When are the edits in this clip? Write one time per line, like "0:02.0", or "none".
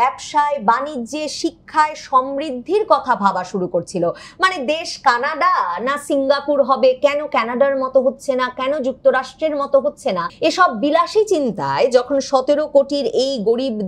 0:10.3